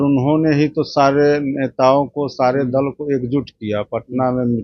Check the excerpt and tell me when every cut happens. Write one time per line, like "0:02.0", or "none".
none